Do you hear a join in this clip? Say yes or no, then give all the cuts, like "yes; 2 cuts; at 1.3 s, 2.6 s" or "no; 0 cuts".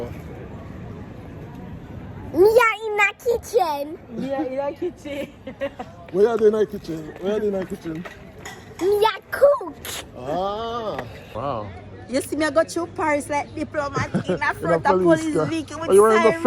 yes; 1 cut; at 11.3 s